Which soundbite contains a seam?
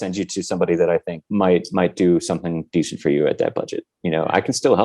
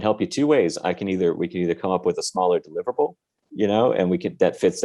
first; 1 cut; at 1.2 s

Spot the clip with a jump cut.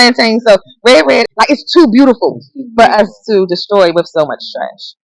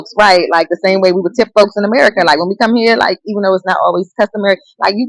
first; 1 cut; at 1.3 s

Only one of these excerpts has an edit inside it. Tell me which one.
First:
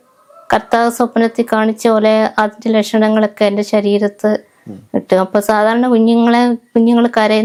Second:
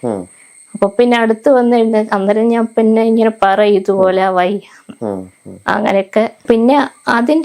second; 1 cut; at 6.4 s

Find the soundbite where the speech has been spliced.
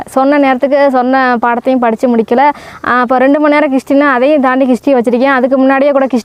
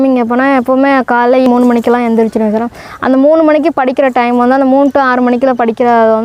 second; 1 cut; at 1.5 s

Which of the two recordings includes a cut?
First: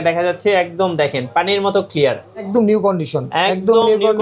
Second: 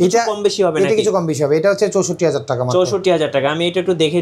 first; 1 cut; at 2.5 s

